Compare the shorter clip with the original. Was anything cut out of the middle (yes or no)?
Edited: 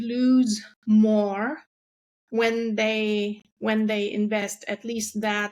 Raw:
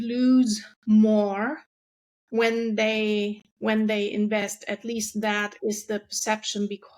no